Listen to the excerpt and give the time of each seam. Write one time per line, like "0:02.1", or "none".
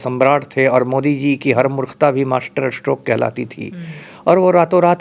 none